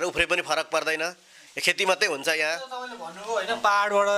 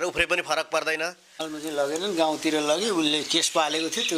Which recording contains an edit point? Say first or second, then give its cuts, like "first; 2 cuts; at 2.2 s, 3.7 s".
second; 1 cut; at 1.3 s